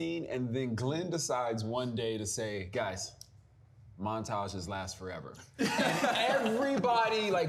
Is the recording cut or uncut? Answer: uncut